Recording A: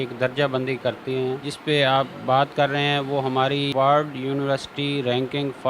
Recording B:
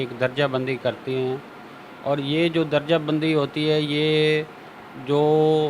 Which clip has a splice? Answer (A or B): A